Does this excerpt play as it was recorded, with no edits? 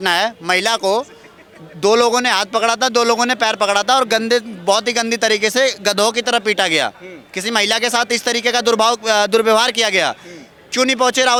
yes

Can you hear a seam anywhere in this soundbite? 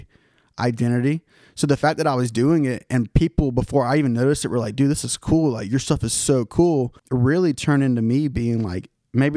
yes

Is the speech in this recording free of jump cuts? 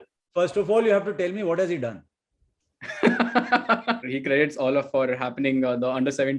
no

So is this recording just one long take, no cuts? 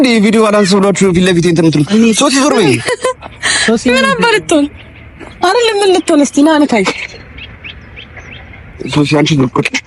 yes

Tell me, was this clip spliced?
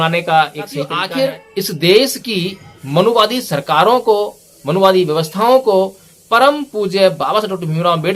yes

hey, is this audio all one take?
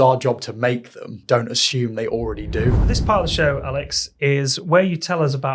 no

